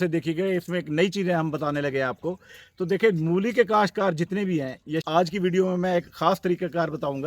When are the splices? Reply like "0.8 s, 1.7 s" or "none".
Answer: 5.0 s